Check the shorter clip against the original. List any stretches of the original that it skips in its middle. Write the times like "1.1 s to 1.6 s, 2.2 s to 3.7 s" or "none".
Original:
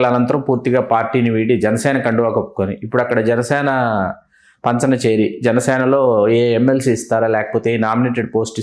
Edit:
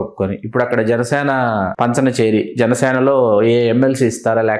4.1 s to 4.6 s

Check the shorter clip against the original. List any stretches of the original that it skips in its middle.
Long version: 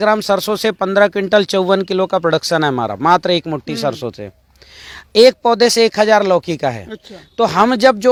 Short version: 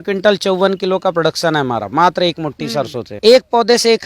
4.1 s to 5.0 s

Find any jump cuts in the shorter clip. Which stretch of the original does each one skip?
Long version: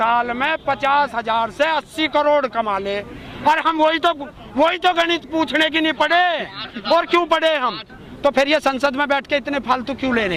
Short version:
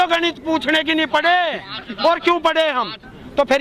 none

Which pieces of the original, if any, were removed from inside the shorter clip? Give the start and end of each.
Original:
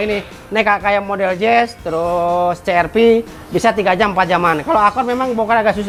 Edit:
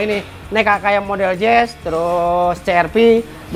none

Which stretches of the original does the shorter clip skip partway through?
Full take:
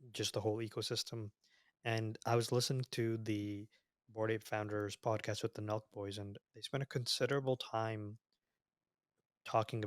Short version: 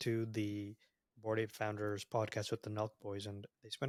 none

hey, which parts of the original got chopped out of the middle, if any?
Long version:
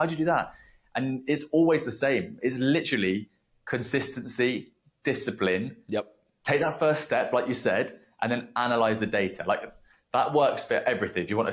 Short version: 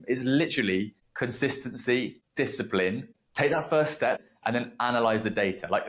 3.4 s to 3.5 s, 4.7 s to 4.9 s, 5.8 s to 6.2 s, 7.3 s to 7.9 s

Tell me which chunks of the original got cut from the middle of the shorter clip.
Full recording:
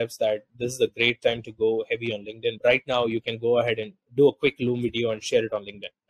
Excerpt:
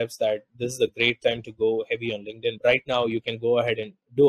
none

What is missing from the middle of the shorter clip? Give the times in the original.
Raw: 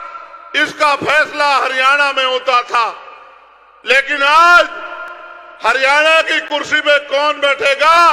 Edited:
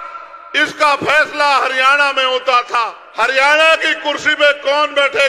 3.0 s to 5.5 s

